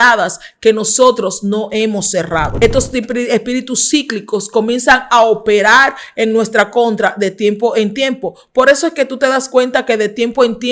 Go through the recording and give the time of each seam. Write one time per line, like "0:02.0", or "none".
0:02.5